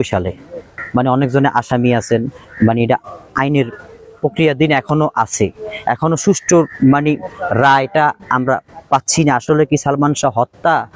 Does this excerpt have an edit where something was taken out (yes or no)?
no